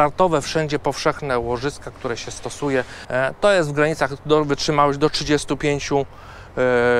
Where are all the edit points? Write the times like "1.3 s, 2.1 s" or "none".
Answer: 3.0 s